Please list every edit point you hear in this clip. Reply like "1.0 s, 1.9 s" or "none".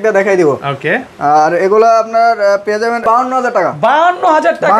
3.0 s